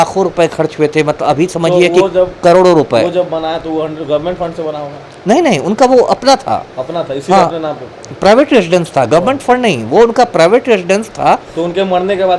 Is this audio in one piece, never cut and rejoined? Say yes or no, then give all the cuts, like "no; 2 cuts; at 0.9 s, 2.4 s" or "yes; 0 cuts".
yes; 0 cuts